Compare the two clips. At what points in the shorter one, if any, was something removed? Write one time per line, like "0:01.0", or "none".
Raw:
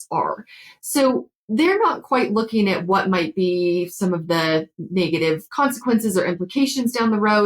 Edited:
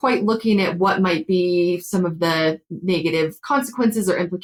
none